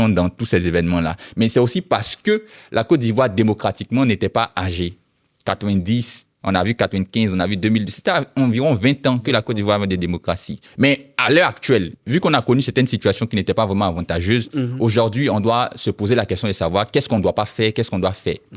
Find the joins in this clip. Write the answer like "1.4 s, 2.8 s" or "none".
none